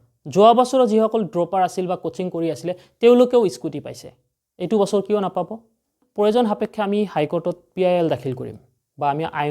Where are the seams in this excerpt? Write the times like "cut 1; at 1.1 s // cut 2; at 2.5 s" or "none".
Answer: cut 1; at 6.0 s